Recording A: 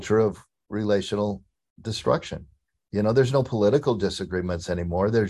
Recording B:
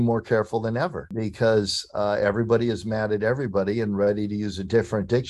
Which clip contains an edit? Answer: B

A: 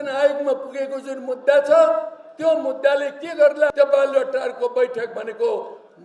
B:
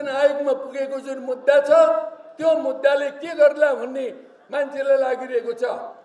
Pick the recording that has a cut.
A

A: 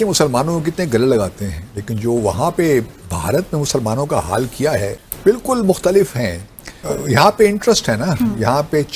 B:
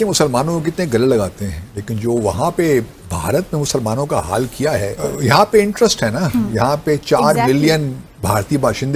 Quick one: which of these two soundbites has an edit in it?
B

